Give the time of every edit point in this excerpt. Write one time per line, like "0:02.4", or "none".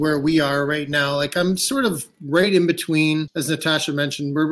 0:03.3